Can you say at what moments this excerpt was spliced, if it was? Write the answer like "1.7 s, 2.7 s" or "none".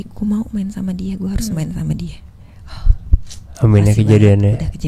none

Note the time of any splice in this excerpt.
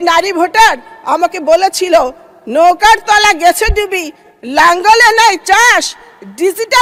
none

